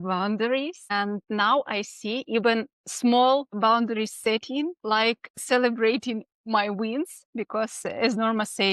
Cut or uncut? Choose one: cut